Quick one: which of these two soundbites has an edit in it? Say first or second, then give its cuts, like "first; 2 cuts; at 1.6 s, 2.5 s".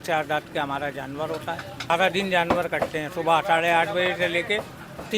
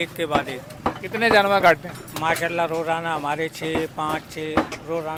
first; 1 cut; at 1.9 s